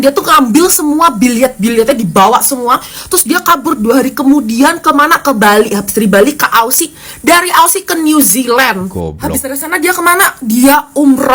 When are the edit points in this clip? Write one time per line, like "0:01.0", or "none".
none

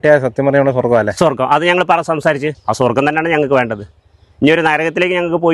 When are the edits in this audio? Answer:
0:02.5

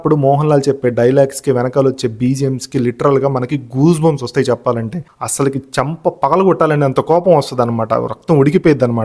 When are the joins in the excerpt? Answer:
0:05.0

